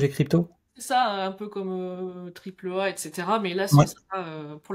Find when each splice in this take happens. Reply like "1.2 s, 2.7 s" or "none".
none